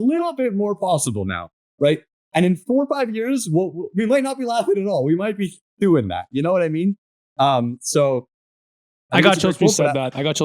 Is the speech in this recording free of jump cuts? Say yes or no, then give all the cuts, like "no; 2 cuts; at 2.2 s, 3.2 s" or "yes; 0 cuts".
no; 1 cut; at 9.0 s